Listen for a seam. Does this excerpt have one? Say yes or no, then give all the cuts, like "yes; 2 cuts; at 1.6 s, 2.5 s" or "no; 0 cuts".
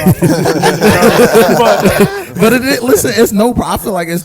no; 0 cuts